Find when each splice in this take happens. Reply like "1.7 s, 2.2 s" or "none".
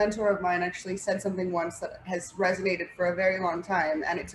none